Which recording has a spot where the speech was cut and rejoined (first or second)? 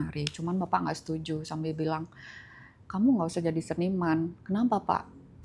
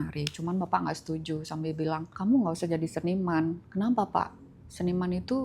second